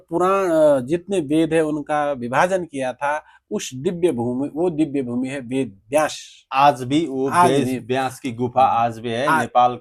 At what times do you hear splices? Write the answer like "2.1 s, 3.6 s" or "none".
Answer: none